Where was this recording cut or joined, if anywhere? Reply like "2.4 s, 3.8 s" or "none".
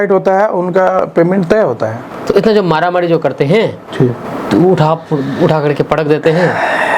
2.1 s